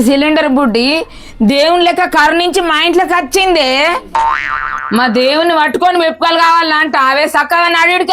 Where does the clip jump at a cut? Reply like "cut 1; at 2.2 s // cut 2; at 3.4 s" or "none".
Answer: none